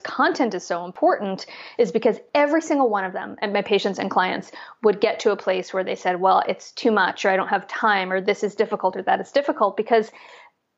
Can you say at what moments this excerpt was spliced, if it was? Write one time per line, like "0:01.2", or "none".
0:02.2